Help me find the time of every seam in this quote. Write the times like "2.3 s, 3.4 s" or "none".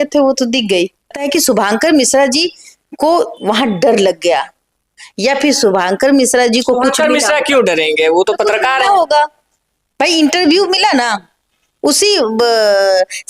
1.3 s